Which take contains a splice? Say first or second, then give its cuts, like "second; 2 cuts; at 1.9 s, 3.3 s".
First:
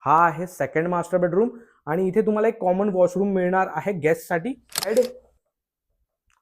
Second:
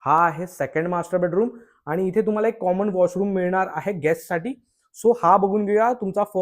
first; 1 cut; at 4.9 s